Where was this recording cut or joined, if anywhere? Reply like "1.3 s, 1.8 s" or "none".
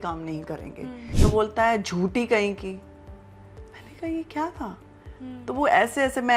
1.1 s